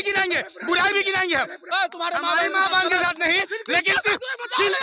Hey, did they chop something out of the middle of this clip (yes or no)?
yes